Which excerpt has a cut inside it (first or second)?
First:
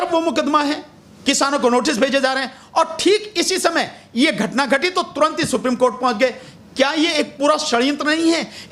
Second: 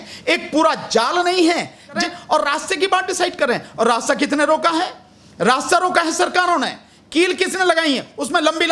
second